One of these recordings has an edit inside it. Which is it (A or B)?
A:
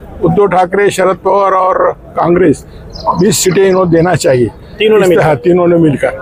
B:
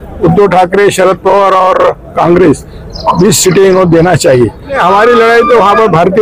B